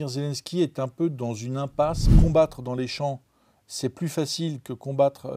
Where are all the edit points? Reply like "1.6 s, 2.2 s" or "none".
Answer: 2.0 s